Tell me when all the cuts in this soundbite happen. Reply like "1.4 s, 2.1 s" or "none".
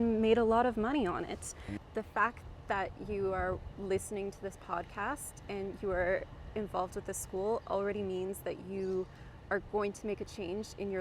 1.7 s